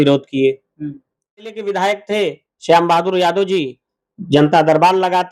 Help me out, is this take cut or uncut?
cut